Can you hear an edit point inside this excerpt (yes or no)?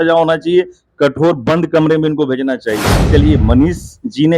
yes